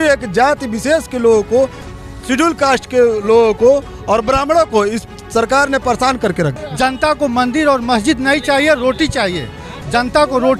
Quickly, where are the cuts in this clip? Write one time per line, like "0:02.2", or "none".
0:06.6